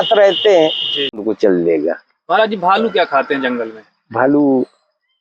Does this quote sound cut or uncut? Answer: cut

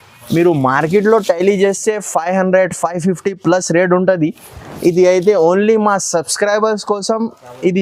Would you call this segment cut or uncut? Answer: uncut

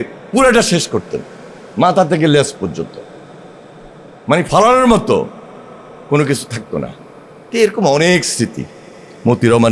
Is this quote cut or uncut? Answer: uncut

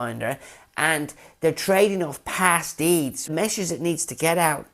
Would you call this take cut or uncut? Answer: cut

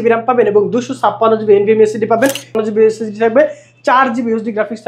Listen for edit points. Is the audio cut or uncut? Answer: cut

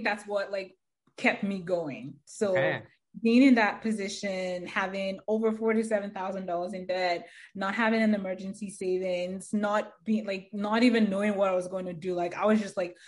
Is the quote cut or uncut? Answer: uncut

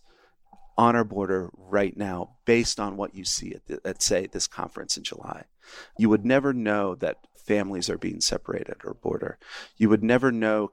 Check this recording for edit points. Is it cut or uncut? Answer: uncut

